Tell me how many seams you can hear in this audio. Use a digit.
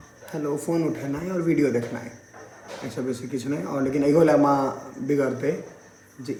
0